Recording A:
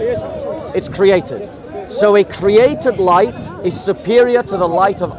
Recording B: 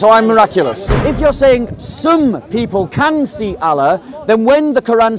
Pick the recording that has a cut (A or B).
B